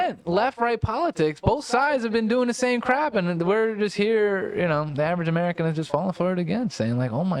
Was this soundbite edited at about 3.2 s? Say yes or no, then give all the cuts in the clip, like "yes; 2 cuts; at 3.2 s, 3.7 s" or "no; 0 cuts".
no; 0 cuts